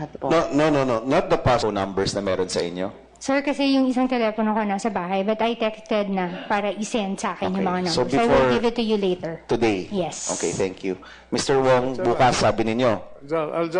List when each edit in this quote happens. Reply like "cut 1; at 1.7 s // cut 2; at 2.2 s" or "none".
none